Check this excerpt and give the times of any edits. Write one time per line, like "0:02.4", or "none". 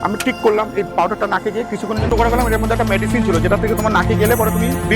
0:02.1